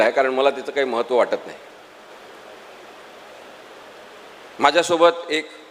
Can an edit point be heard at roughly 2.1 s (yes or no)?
yes